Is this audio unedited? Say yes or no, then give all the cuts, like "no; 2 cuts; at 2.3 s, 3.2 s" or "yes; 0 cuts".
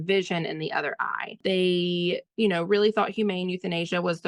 no; 1 cut; at 1.4 s